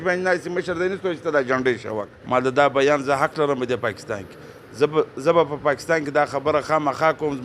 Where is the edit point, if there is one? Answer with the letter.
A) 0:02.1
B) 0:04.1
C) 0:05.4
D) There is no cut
A